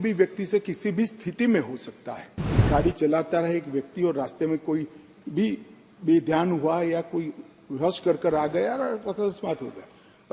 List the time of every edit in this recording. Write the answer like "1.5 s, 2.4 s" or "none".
2.7 s

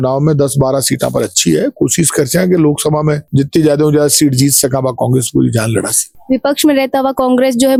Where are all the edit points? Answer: none

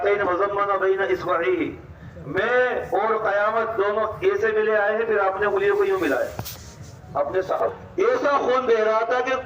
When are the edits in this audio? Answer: 7.7 s

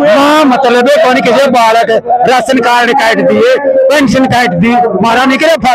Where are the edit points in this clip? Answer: none

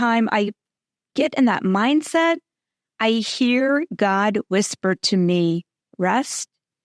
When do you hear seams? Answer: none

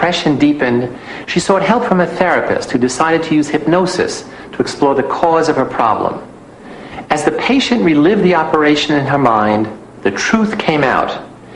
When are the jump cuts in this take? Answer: 5.7 s

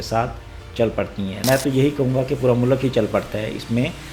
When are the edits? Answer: 1.4 s

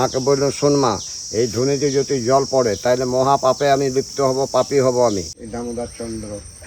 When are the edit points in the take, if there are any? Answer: 5.4 s

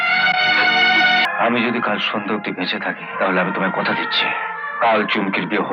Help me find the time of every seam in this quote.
1.2 s, 3.1 s, 4.7 s

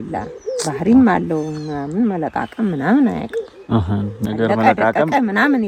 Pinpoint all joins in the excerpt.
none

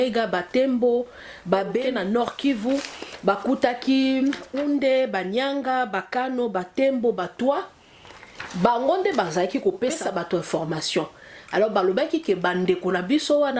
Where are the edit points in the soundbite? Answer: 1.8 s, 4.5 s, 10.0 s

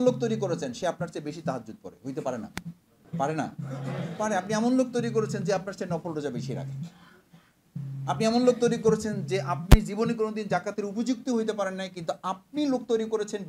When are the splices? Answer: 2.9 s

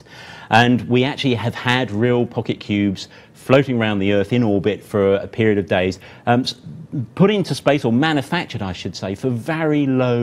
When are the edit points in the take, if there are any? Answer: 7.5 s

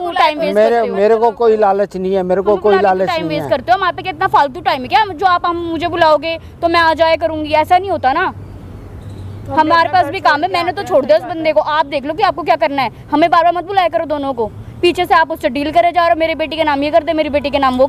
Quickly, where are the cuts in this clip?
none

